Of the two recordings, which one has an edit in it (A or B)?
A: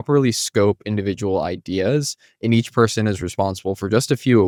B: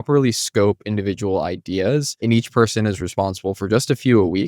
B